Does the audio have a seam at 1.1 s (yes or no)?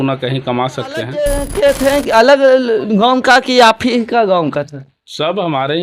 yes